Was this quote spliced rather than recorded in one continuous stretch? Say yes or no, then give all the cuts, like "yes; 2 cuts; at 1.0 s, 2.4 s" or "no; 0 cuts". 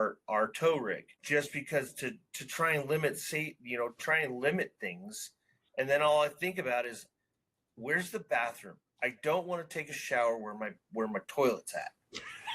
yes; 1 cut; at 1.2 s